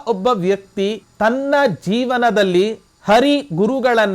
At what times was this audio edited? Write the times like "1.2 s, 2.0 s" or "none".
1.0 s, 2.9 s